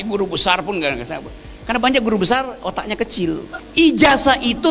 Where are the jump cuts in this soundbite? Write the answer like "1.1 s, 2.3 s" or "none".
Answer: 3.5 s